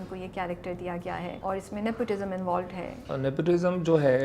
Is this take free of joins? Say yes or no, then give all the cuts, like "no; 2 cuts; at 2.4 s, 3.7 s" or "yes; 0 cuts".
no; 2 cuts; at 1.4 s, 3.0 s